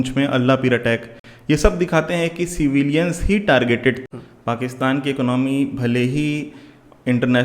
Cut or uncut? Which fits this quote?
cut